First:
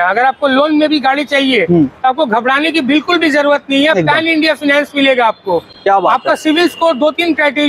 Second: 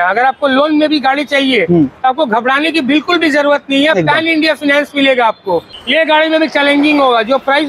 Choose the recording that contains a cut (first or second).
second